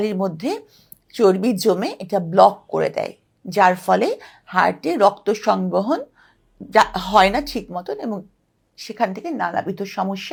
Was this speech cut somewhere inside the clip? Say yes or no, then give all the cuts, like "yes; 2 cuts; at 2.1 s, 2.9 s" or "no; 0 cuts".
no; 0 cuts